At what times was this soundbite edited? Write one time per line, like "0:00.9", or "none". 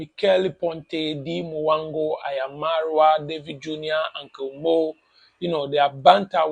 none